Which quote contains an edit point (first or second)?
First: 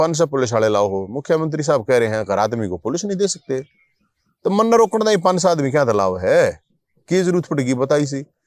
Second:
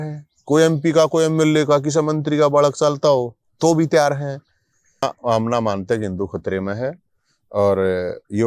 second